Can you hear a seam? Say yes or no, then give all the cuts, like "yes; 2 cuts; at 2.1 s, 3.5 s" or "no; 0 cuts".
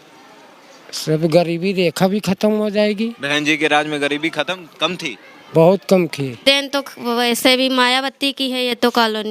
yes; 1 cut; at 6.4 s